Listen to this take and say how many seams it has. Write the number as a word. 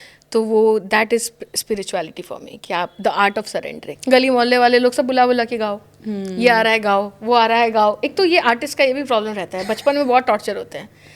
one